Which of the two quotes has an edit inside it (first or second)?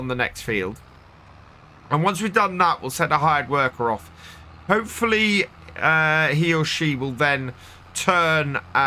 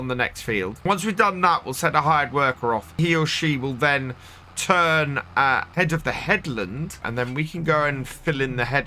second